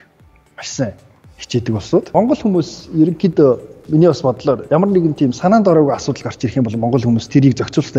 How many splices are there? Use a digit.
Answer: 1